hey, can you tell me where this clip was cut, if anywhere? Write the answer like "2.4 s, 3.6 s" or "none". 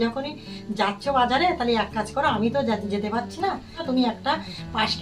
3.8 s